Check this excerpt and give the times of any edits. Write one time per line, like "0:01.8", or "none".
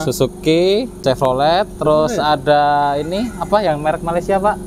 0:00.9